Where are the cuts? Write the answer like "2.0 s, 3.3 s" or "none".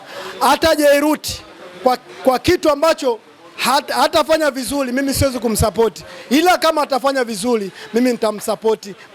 none